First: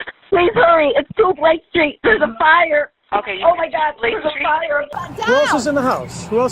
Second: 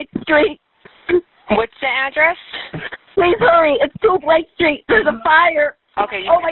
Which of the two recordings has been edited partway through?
first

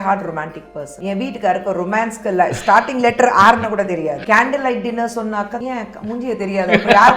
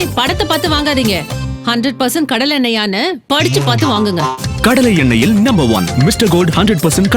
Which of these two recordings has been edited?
first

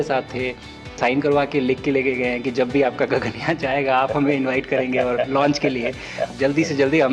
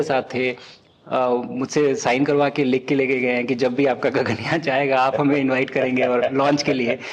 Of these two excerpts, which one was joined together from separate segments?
first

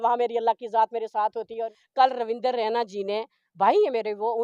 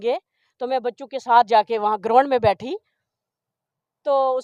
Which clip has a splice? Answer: first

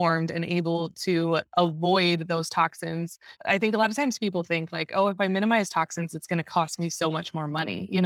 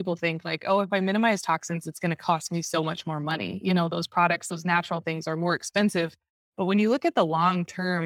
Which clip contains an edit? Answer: first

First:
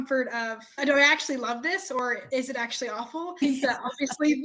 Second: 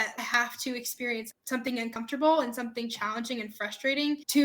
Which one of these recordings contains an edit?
first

